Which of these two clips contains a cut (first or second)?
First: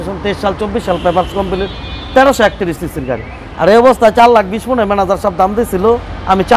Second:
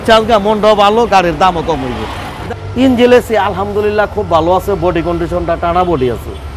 second